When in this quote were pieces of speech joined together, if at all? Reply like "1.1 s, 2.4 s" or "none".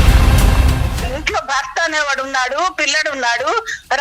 1.0 s

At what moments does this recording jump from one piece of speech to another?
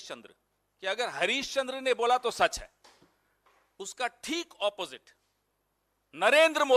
none

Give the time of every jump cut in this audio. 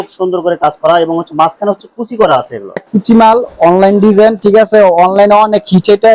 2.9 s

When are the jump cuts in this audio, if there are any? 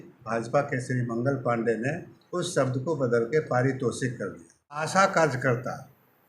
4.8 s

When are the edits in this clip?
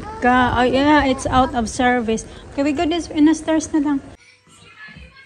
4.2 s

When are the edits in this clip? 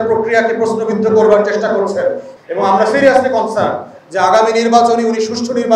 2.3 s

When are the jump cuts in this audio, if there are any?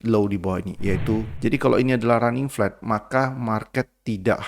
1.3 s

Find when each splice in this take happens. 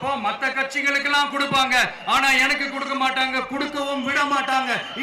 none

